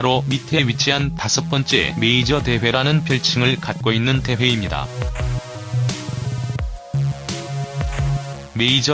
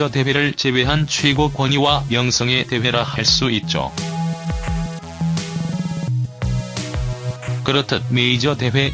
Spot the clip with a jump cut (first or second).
first